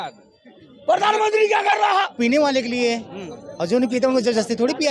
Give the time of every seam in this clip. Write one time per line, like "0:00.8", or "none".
0:02.1